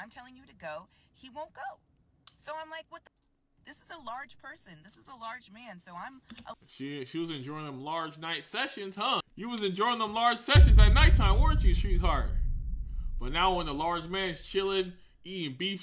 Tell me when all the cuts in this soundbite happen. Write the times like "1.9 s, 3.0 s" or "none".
6.7 s, 9.3 s

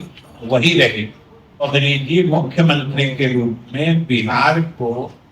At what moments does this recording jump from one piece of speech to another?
1.8 s

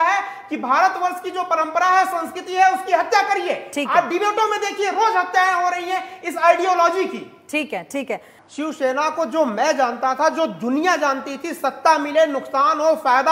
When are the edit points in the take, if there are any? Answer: 8.3 s

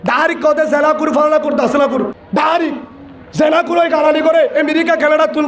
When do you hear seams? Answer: 2.2 s

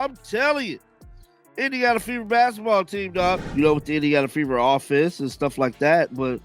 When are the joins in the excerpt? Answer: 3.4 s

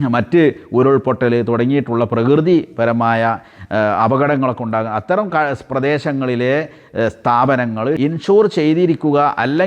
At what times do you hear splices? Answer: 8.0 s

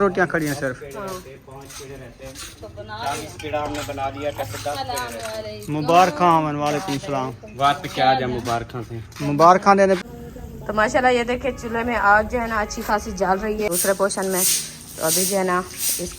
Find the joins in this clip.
10.0 s, 13.7 s

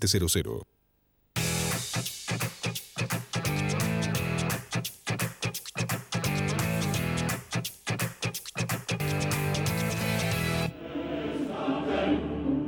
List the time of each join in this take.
11.3 s

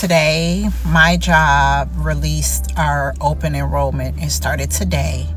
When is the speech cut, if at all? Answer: none

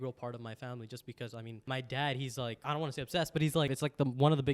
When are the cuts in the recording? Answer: 1.5 s, 2.6 s, 3.7 s

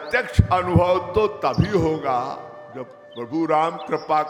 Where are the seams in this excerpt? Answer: none

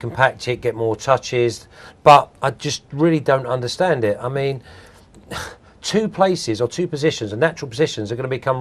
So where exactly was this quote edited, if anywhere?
4.6 s

